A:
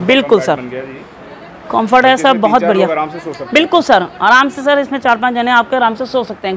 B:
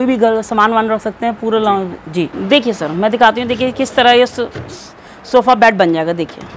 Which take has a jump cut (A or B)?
B